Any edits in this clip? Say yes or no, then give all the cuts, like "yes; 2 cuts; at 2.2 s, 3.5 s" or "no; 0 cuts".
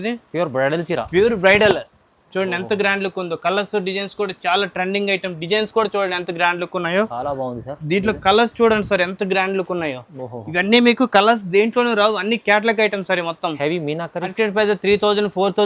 yes; 1 cut; at 14.3 s